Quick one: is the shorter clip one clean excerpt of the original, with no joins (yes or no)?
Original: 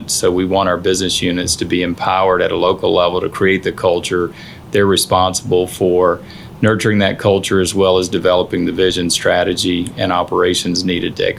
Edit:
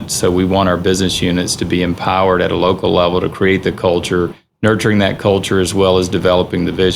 no